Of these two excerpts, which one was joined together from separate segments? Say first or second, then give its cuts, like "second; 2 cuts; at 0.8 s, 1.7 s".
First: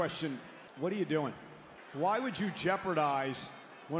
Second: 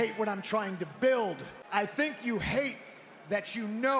second; 1 cut; at 1.5 s